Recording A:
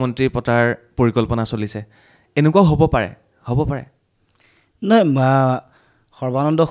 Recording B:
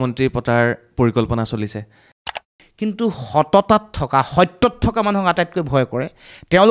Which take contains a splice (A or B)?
B